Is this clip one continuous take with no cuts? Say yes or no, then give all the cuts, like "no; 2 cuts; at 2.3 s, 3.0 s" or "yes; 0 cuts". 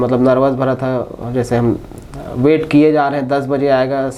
yes; 0 cuts